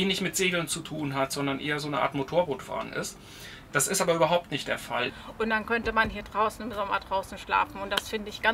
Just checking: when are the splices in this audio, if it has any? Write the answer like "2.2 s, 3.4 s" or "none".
5.2 s